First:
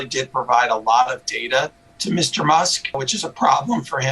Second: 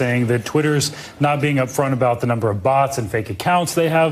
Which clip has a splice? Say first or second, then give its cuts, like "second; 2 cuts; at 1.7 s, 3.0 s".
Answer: first; 1 cut; at 3.1 s